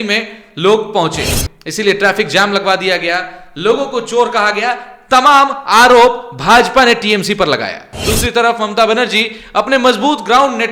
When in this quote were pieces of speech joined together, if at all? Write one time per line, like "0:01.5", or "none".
0:07.9